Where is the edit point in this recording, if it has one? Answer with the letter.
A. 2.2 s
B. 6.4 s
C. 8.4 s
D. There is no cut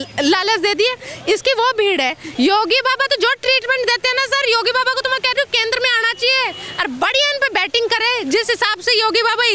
A